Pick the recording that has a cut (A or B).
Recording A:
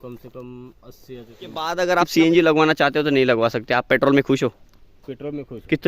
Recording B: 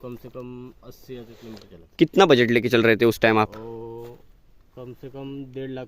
A